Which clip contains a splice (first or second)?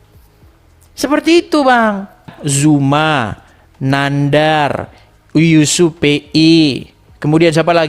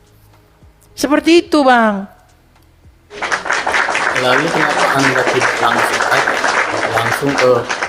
first